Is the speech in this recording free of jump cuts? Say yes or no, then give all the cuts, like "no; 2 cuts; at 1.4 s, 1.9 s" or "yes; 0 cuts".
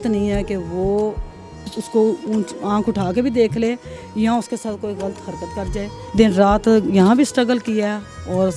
no; 1 cut; at 6.0 s